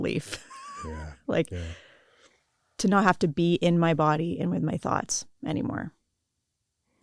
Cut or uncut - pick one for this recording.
uncut